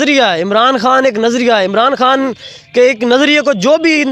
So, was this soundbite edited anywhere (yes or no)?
no